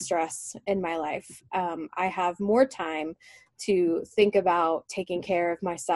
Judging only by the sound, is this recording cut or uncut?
uncut